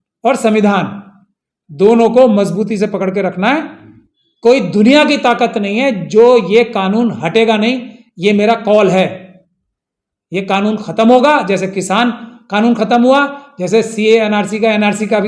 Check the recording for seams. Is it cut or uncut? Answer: uncut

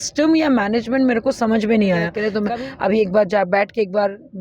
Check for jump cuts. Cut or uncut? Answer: cut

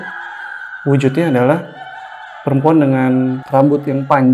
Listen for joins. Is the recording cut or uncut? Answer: cut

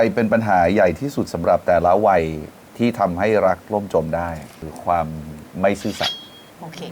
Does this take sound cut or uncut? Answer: uncut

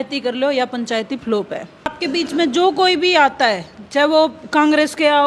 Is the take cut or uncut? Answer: cut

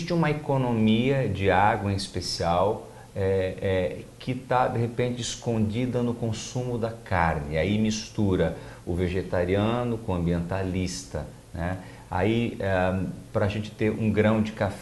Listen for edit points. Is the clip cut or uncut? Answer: cut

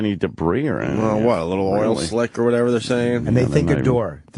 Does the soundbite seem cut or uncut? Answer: uncut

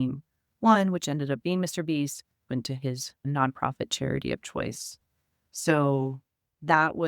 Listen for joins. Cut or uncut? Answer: cut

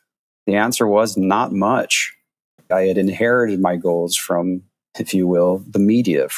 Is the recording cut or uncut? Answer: cut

